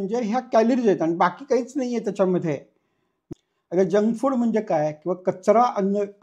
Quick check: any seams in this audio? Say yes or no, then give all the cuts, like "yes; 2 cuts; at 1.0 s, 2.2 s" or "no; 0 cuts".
yes; 1 cut; at 3.1 s